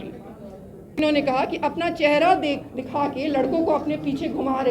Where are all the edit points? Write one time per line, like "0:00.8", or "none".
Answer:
0:01.0